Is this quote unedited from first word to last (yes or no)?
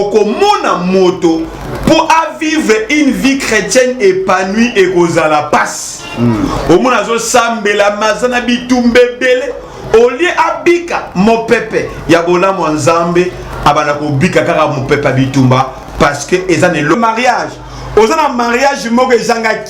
no